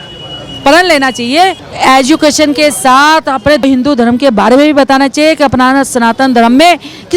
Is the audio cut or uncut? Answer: cut